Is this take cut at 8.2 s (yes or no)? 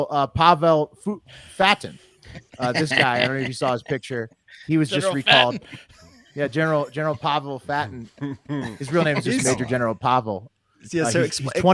no